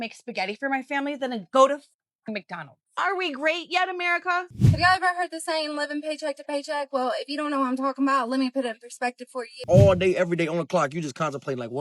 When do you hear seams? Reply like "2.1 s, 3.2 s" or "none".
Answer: 4.5 s, 9.6 s